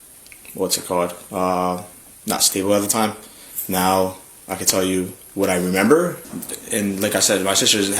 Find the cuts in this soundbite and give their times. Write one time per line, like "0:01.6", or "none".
0:06.2

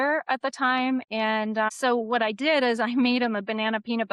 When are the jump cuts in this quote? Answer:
none

